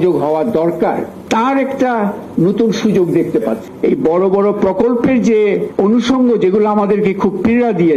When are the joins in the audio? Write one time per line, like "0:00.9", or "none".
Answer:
0:01.1
0:03.7
0:05.7